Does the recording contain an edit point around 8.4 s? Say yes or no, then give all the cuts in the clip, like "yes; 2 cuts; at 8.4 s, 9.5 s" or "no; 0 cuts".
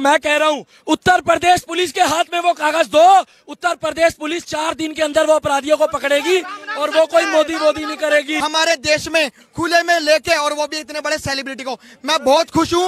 yes; 1 cut; at 8.4 s